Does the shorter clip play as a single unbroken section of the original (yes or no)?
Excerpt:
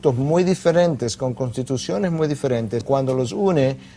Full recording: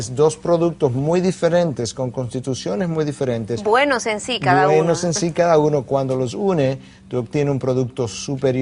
no